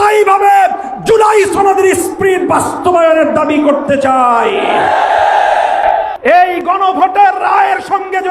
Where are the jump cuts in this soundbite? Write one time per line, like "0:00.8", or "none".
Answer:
0:06.1